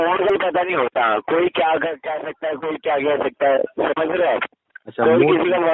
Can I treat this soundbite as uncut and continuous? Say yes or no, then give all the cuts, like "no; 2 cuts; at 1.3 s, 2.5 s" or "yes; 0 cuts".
yes; 0 cuts